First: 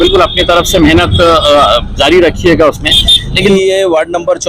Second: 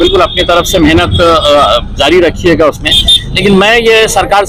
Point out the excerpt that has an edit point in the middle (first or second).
first